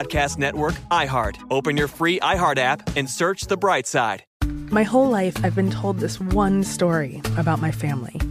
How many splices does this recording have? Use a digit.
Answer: 1